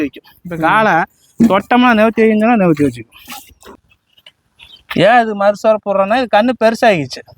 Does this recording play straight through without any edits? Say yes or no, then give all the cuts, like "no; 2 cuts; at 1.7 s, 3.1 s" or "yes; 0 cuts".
no; 1 cut; at 3.7 s